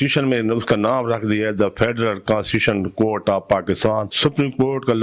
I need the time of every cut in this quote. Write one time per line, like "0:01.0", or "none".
0:04.1